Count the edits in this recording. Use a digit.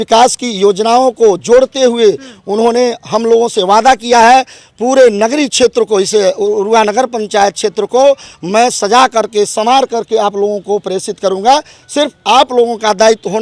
0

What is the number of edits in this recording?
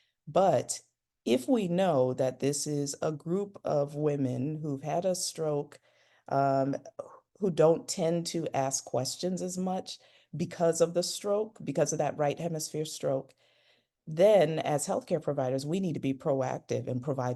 0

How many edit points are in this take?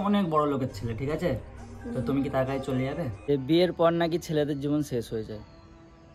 1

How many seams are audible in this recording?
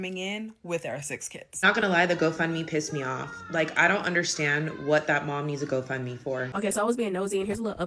2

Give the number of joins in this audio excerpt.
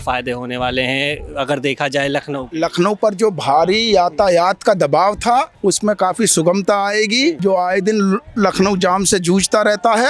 2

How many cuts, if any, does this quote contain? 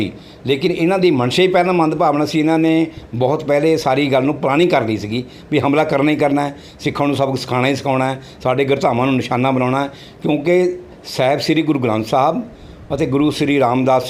0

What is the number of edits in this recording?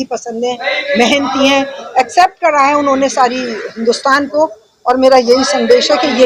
0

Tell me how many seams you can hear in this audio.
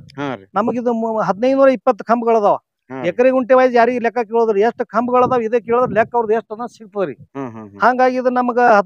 0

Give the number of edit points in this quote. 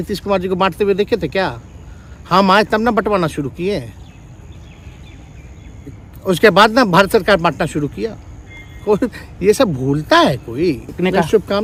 0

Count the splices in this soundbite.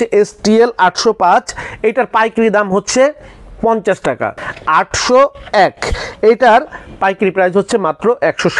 1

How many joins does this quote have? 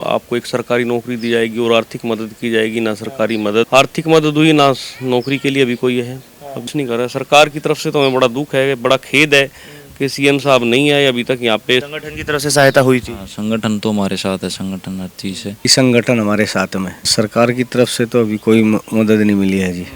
5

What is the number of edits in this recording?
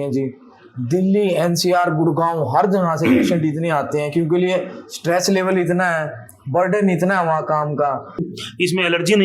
1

